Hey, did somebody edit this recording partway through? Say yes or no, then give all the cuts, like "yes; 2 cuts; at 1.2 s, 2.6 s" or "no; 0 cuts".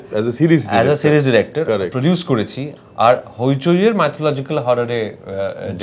yes; 1 cut; at 2.7 s